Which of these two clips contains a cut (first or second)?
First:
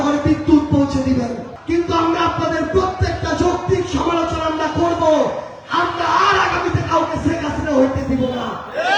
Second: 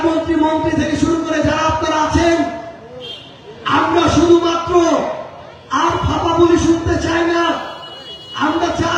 first